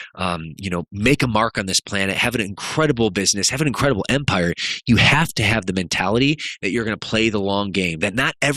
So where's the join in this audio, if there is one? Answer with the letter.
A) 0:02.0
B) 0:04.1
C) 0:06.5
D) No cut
D